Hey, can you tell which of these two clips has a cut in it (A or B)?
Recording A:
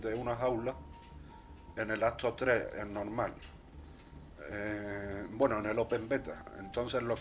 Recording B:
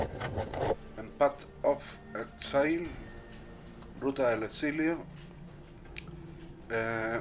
A